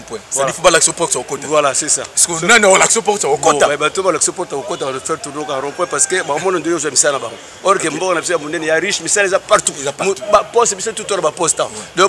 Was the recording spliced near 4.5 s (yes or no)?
no